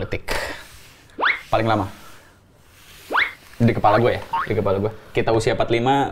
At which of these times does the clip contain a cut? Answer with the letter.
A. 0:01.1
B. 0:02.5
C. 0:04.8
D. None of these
D